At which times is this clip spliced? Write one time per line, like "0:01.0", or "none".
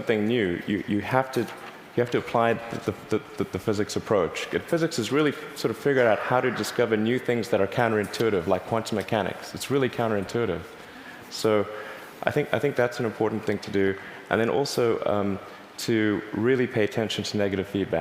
none